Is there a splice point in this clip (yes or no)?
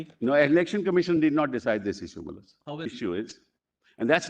yes